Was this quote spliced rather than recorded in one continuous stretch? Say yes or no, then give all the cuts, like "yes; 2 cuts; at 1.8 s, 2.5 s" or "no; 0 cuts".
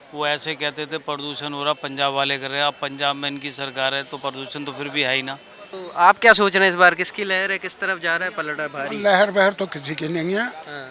yes; 1 cut; at 5.7 s